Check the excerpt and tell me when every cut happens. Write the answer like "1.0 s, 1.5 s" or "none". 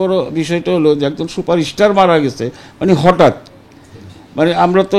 none